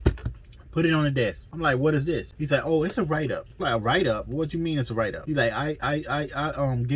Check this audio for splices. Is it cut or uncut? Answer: cut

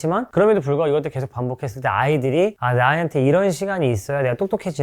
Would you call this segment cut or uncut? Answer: uncut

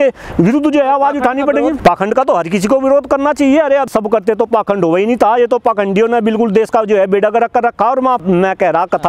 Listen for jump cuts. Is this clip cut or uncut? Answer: cut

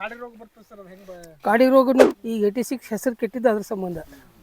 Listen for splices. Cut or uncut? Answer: cut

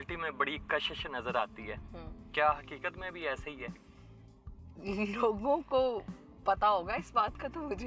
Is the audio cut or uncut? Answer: uncut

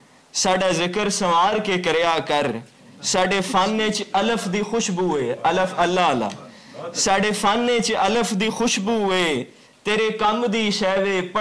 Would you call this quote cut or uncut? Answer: uncut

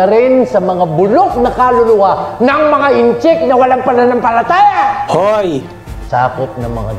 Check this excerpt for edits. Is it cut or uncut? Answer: cut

